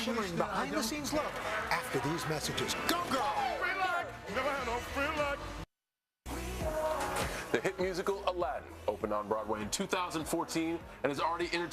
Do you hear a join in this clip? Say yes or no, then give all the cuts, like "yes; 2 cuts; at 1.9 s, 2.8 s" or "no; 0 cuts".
yes; 1 cut; at 7.1 s